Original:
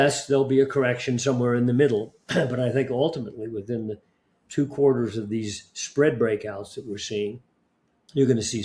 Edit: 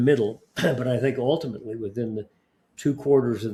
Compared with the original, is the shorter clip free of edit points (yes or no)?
yes